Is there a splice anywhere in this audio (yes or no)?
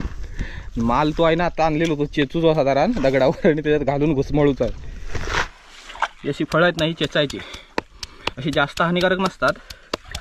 yes